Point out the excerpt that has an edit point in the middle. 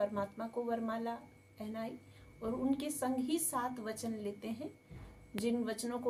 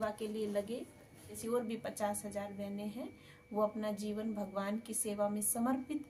second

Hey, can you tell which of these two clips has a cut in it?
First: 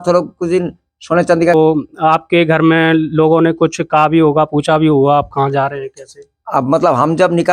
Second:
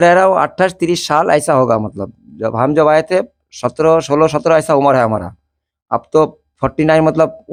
first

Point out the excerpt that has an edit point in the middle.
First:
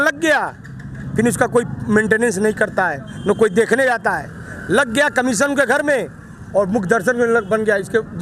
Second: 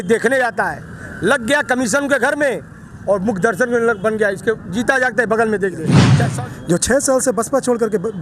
second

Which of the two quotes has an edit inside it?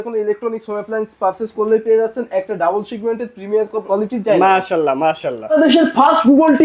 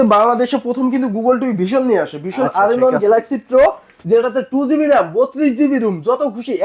first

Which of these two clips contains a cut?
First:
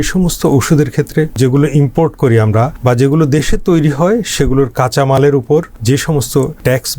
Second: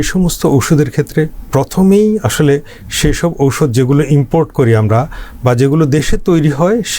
first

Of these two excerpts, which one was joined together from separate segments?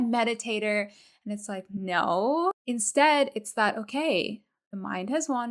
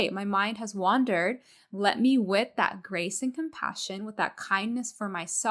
first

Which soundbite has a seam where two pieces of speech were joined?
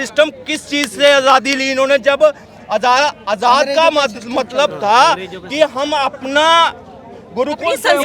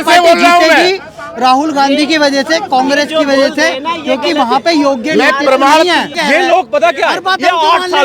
second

